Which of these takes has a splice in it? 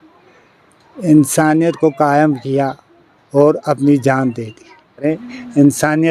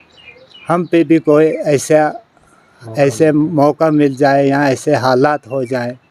first; 1 cut; at 5.0 s

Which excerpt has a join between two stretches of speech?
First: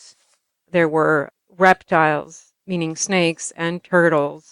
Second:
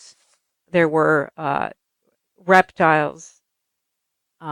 first; 2 cuts; at 1.3 s, 2.5 s

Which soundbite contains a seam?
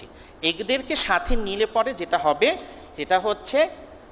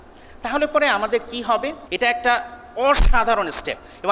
second; 1 cut; at 1.8 s

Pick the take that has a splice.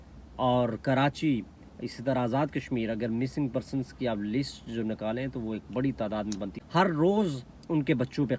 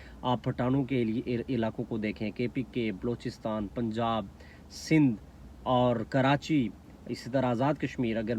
first; 1 cut; at 6.5 s

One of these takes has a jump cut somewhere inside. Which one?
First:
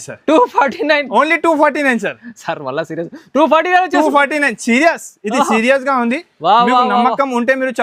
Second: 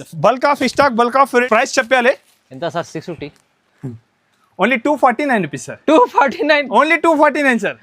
second; 1 cut; at 1.5 s

